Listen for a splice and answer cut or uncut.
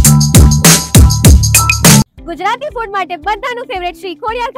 cut